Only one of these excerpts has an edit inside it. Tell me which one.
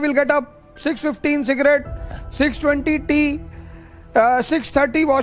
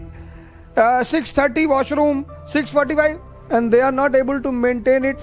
second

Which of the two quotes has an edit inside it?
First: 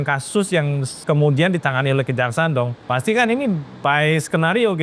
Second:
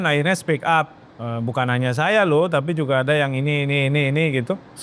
first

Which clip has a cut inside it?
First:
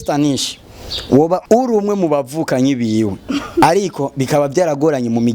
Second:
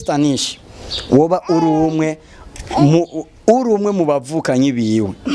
first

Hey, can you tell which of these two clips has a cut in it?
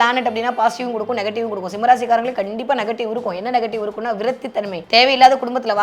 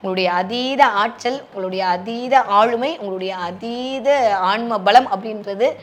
first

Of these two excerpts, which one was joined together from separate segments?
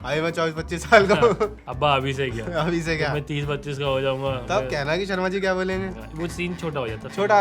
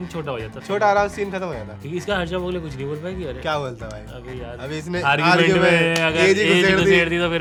first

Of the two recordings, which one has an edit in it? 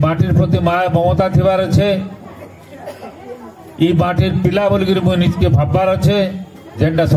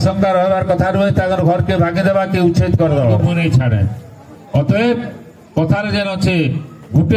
second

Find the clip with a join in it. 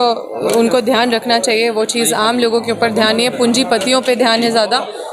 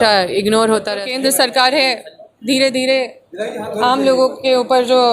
second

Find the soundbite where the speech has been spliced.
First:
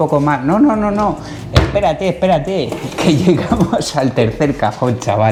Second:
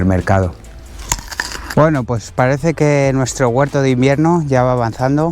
second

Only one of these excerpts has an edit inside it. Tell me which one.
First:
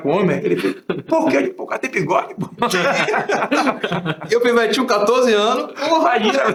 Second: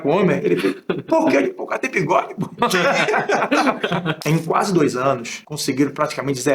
second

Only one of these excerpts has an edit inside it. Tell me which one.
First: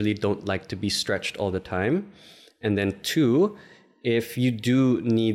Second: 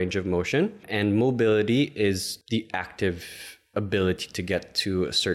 second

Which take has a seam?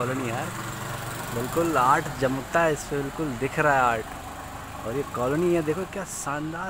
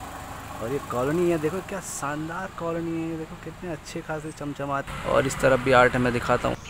second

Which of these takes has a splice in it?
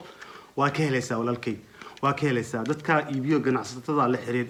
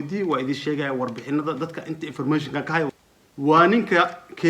second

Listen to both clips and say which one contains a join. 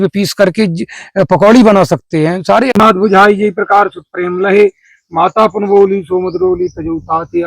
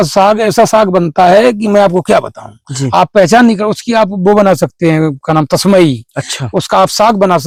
first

